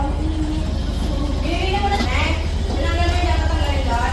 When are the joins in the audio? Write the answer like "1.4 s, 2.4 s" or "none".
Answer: 2.1 s